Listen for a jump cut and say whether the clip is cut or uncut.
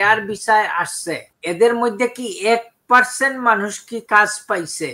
cut